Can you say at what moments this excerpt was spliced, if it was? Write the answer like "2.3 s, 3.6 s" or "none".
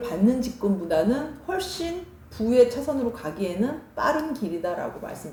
none